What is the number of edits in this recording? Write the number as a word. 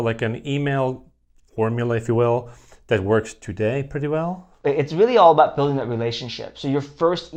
zero